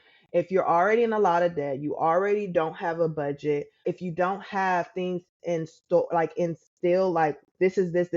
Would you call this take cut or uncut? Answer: cut